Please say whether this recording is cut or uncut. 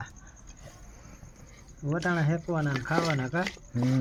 uncut